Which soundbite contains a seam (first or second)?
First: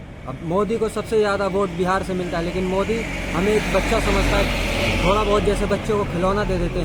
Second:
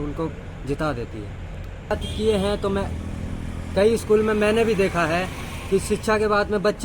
second